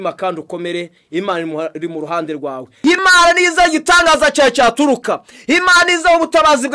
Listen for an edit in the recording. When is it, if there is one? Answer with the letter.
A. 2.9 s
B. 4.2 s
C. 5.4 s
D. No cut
A